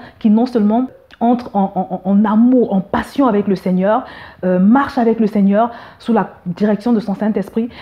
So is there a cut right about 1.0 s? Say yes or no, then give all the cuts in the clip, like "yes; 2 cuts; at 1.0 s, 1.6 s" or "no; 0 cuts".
yes; 1 cut; at 1.0 s